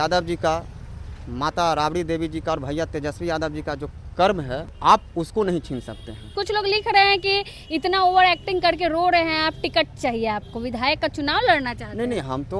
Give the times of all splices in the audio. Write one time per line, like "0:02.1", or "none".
0:04.7
0:06.3